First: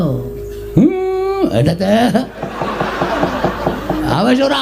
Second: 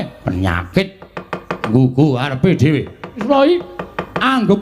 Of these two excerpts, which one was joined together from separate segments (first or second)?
second